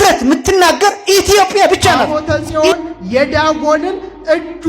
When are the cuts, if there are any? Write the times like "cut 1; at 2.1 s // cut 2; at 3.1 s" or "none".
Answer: cut 1; at 2.0 s